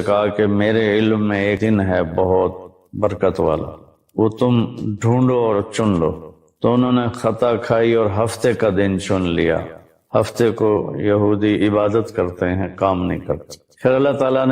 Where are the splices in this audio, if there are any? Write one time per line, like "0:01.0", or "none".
0:01.6